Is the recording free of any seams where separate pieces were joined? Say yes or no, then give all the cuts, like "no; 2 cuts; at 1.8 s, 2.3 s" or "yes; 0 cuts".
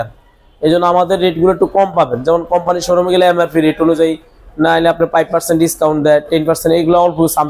yes; 0 cuts